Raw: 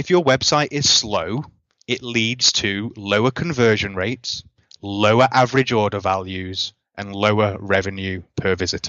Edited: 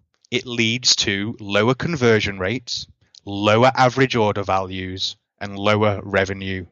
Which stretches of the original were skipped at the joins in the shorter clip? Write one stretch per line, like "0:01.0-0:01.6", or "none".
none